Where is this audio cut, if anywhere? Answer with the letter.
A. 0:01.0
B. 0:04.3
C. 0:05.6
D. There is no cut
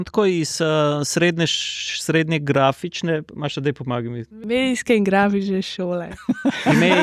B